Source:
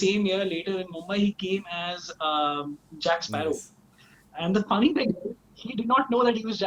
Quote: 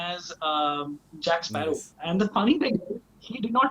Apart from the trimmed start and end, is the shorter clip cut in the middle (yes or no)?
yes